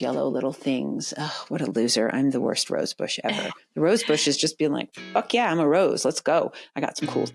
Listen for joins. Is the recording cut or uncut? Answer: uncut